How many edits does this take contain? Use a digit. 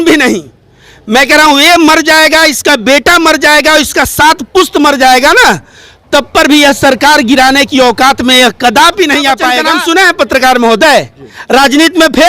1